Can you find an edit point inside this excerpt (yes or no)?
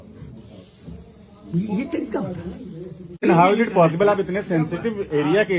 yes